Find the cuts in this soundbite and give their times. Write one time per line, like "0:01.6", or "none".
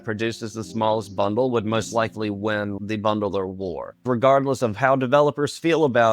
0:02.7
0:04.0